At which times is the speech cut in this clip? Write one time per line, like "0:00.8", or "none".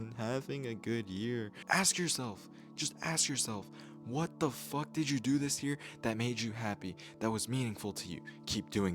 0:01.6